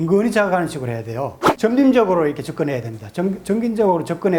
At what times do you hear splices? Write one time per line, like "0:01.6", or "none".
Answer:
0:01.5